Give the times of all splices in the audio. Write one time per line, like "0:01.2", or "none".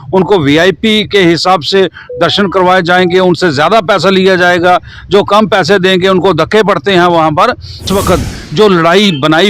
0:07.9